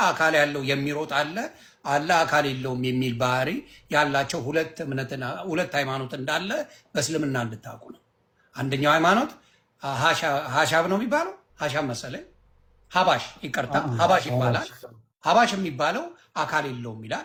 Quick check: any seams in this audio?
no; 0 cuts

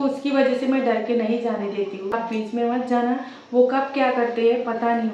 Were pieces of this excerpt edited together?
yes; 1 cut; at 2.1 s

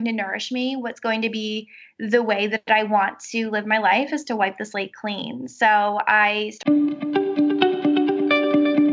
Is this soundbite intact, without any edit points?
no; 1 cut; at 6.5 s

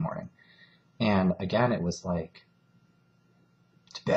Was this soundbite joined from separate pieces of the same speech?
yes; 1 cut; at 1.5 s

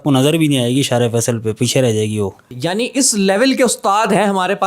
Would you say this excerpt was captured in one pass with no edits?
yes; 0 cuts

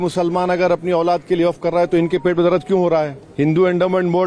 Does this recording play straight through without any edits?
no; 1 cut; at 3.2 s

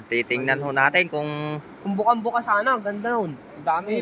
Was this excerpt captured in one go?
yes; 0 cuts

